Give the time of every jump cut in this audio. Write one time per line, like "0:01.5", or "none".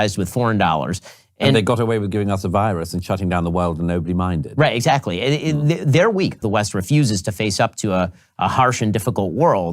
0:06.4